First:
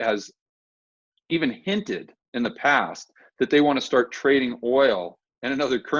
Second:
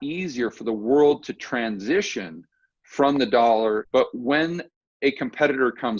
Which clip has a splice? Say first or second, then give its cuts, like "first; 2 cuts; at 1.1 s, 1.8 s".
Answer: second; 1 cut; at 3.9 s